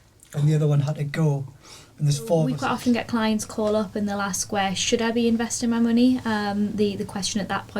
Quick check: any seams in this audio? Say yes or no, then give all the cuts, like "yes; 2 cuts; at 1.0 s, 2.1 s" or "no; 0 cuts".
yes; 1 cut; at 2.5 s